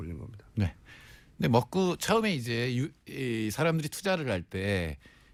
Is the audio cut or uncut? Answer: uncut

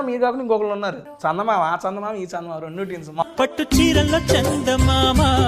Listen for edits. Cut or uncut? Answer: cut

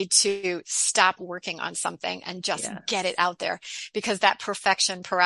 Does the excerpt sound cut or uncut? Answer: uncut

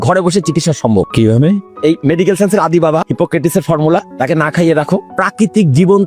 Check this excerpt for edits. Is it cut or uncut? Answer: cut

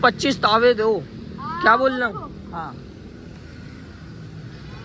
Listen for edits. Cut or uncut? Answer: uncut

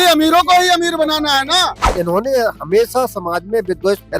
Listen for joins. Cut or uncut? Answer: cut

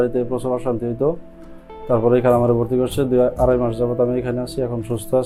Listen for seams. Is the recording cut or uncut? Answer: uncut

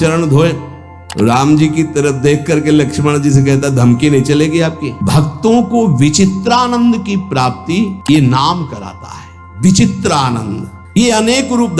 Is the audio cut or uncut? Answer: cut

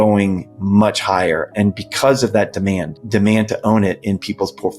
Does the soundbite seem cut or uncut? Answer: cut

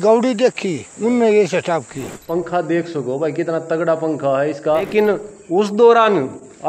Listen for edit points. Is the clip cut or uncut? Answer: cut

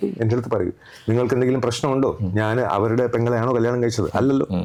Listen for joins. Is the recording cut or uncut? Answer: uncut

